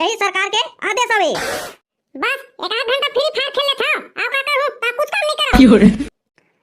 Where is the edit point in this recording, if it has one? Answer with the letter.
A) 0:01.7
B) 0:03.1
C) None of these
A